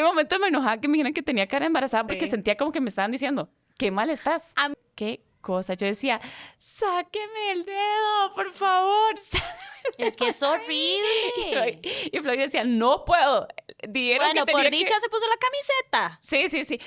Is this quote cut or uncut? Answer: cut